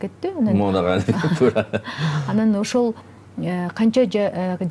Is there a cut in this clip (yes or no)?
no